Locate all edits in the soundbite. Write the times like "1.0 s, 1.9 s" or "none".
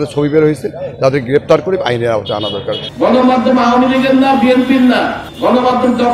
2.9 s, 5.2 s

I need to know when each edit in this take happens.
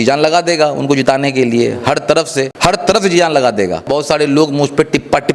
2.5 s, 3.9 s

